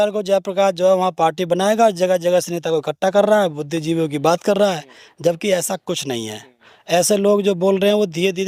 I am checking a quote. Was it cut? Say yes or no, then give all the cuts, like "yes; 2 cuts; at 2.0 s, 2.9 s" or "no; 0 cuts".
no; 0 cuts